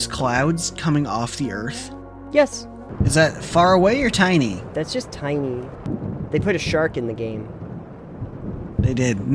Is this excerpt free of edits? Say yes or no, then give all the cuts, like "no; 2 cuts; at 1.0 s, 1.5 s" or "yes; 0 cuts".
no; 2 cuts; at 2.8 s, 5.9 s